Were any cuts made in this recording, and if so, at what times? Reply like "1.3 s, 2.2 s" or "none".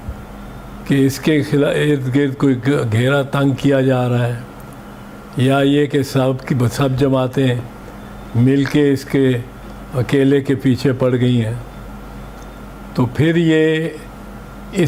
none